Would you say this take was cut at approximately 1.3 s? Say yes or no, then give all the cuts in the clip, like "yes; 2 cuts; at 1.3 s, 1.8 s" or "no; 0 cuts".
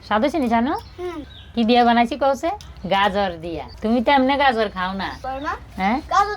no; 2 cuts; at 2.7 s, 5.2 s